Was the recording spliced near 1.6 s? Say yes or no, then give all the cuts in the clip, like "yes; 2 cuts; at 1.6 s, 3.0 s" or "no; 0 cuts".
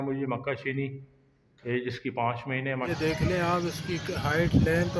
no; 1 cut; at 2.9 s